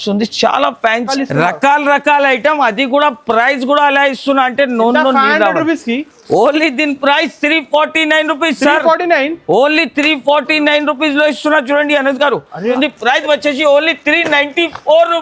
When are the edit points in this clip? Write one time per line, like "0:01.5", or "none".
0:01.1
0:12.7